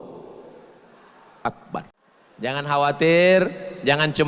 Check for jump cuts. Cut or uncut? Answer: cut